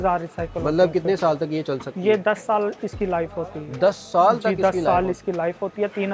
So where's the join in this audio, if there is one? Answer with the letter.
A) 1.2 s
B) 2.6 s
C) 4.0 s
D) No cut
D